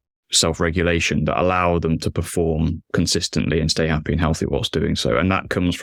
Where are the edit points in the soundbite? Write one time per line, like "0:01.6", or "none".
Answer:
none